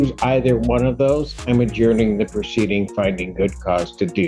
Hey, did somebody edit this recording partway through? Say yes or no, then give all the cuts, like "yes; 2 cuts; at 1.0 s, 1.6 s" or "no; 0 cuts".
no; 0 cuts